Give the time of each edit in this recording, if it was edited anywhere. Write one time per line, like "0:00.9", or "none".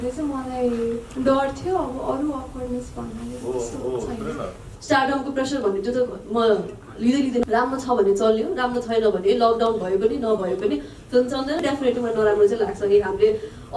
0:04.7
0:07.4
0:11.6